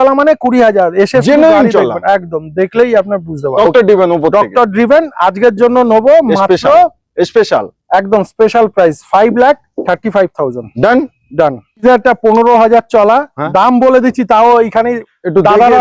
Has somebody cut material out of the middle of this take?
yes; 2 cuts; at 3.6 s, 11.8 s

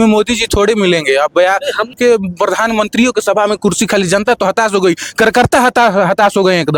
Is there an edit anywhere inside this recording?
yes; 1 cut; at 1.9 s

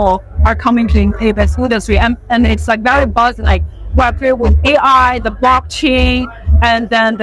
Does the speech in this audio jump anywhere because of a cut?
no; 0 cuts

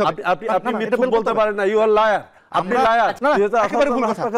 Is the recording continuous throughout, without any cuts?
no; 1 cut; at 3.2 s

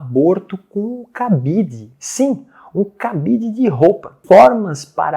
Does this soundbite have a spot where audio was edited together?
yes; 1 cut; at 4.2 s

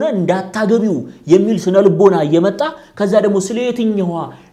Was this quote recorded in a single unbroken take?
yes; 0 cuts

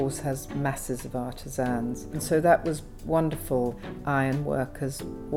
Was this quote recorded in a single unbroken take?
no; 2 cuts; at 2.2 s, 3.8 s

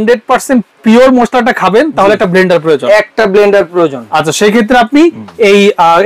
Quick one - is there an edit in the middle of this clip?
no; 0 cuts

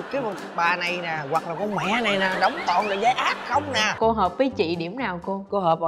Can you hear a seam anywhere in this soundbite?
yes; 1 cut; at 3.9 s

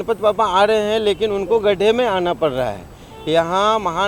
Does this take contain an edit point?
no; 0 cuts

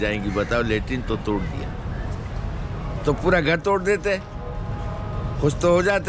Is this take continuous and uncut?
yes; 0 cuts

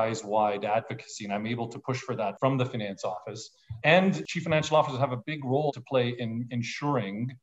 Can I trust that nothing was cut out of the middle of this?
no; 3 cuts; at 2.4 s, 4.3 s, 5.7 s

